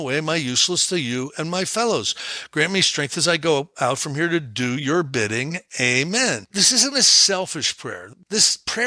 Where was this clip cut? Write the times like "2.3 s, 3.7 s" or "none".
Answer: 6.5 s, 8.0 s